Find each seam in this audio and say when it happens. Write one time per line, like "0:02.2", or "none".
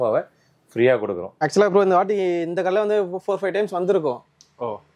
0:01.3